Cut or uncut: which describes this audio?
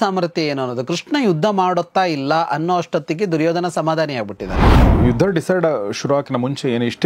cut